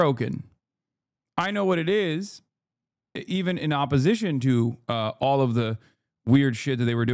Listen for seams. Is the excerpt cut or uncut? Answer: uncut